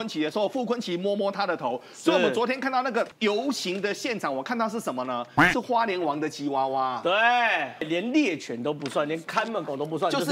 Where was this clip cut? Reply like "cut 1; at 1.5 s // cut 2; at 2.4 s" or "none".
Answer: cut 1; at 3.1 s // cut 2; at 7.8 s